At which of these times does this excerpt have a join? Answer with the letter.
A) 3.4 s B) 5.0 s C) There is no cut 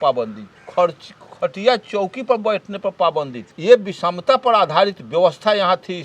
A